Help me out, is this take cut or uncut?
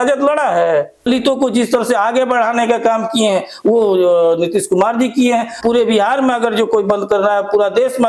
cut